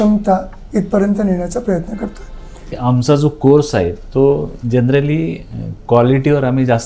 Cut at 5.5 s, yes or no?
no